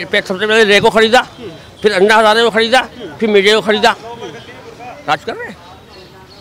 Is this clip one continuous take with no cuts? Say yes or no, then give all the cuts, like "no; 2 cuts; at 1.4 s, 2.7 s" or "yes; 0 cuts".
yes; 0 cuts